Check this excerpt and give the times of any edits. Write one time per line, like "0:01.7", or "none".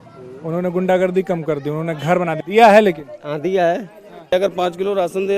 0:02.4
0:04.3